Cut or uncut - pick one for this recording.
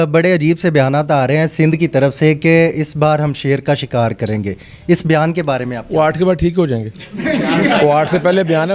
uncut